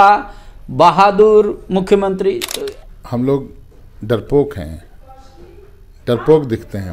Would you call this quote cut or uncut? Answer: cut